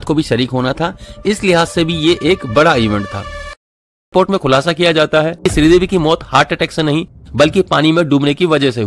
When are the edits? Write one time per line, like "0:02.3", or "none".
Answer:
0:04.1
0:05.4

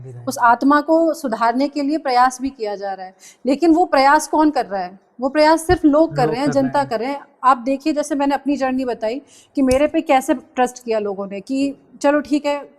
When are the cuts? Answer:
none

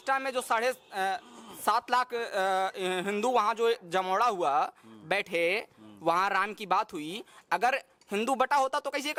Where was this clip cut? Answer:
none

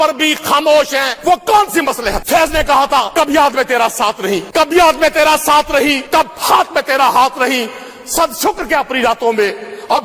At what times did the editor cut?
0:01.1
0:02.2
0:03.1
0:04.5
0:06.0

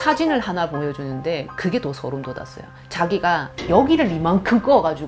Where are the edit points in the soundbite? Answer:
0:03.5

